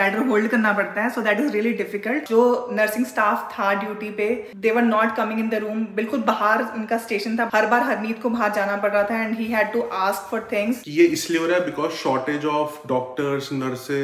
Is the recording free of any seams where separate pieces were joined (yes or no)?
no